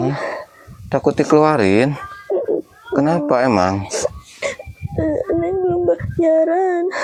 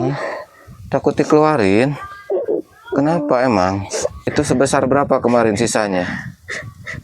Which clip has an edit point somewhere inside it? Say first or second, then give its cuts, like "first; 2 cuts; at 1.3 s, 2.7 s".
second; 1 cut; at 4.2 s